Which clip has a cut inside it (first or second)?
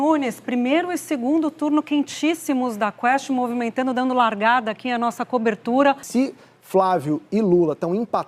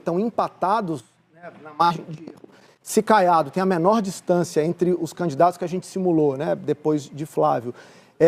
first